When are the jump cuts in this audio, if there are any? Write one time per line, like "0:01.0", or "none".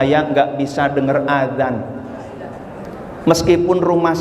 none